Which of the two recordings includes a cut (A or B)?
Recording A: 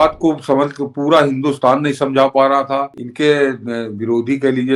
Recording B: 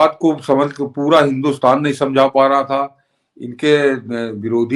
A